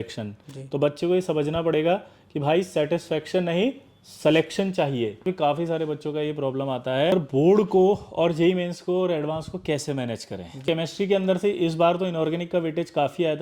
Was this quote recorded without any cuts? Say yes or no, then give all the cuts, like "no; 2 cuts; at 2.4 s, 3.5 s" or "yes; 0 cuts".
no; 3 cuts; at 5.2 s, 7.1 s, 10.6 s